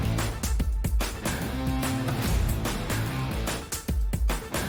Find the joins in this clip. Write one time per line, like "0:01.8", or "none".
none